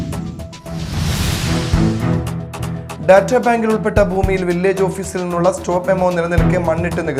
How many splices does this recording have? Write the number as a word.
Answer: one